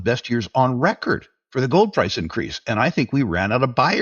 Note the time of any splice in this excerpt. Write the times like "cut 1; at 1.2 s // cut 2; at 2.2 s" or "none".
cut 1; at 1.4 s